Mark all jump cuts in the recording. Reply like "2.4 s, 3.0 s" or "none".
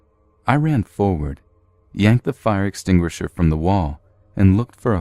1.9 s